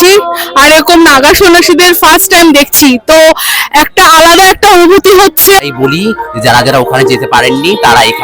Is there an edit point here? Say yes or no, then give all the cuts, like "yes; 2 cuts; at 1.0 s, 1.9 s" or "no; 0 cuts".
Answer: yes; 1 cut; at 5.6 s